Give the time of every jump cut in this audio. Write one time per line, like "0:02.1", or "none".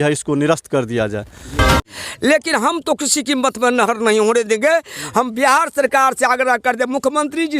0:01.7